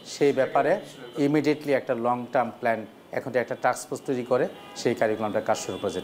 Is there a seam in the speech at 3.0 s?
no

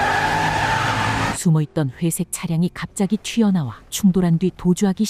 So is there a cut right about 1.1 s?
no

